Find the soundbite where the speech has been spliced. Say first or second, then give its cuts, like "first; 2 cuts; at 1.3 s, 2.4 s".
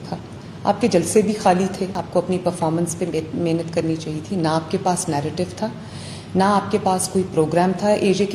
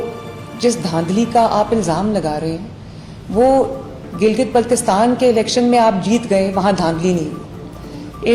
first; 1 cut; at 2.0 s